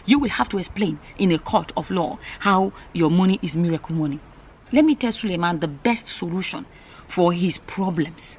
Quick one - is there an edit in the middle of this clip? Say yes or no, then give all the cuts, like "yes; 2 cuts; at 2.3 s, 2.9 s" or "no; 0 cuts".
no; 0 cuts